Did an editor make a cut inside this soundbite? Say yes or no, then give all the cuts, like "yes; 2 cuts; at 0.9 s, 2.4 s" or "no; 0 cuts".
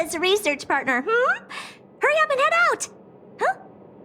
no; 0 cuts